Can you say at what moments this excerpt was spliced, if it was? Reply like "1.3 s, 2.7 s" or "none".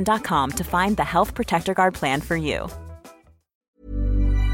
3.6 s